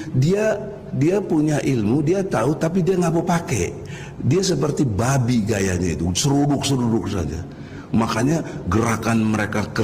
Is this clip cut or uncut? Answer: uncut